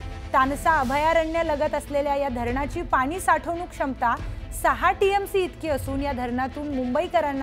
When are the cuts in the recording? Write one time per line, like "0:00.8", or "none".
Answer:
none